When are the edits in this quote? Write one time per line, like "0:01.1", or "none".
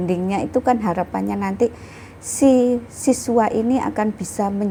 none